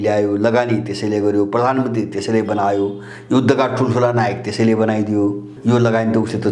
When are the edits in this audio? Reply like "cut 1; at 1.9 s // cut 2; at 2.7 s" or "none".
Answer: cut 1; at 5.5 s